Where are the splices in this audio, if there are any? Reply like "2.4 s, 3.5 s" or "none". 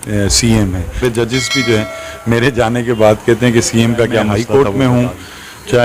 1.0 s, 4.3 s